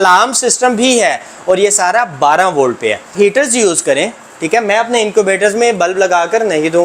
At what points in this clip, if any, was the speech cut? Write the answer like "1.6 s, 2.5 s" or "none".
3.0 s